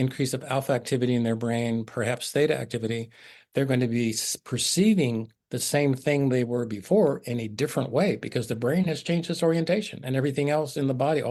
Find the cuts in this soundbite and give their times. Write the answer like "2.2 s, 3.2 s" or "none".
none